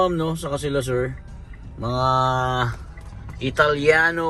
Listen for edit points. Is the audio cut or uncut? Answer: uncut